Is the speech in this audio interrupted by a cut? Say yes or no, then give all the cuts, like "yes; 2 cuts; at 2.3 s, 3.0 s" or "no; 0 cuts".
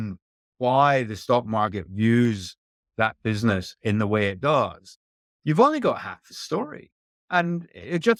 no; 0 cuts